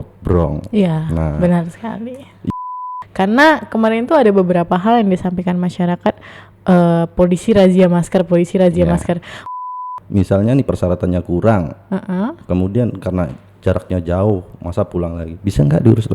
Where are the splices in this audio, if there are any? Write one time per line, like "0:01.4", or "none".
0:02.5
0:09.7